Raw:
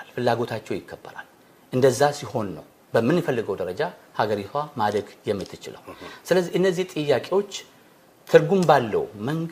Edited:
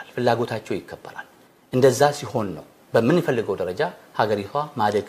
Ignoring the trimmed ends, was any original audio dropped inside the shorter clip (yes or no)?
no